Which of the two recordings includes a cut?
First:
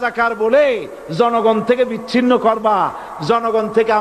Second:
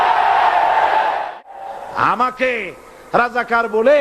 second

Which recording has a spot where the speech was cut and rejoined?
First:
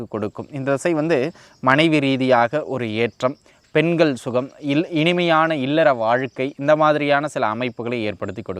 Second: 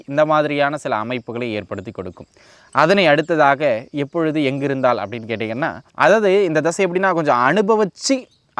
second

